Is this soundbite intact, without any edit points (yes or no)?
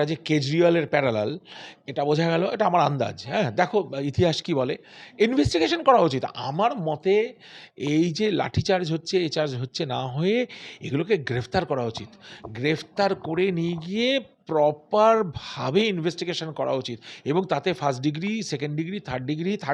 yes